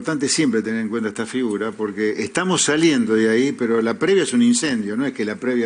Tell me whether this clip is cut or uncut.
uncut